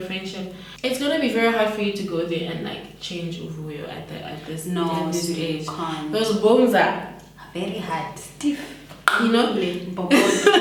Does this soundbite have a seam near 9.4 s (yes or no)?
no